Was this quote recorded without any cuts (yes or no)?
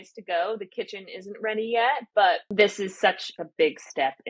no